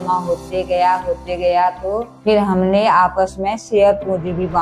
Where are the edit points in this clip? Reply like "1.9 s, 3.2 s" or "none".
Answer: 2.1 s